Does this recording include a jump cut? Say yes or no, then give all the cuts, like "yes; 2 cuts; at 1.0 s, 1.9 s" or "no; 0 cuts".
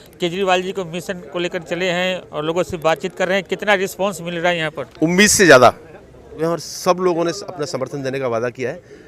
yes; 2 cuts; at 4.8 s, 6.4 s